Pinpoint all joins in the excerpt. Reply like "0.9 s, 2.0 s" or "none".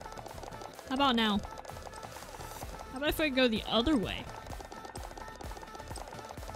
none